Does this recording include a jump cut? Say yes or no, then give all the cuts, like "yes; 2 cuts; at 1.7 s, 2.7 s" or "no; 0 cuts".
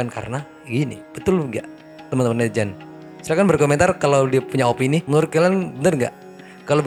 no; 0 cuts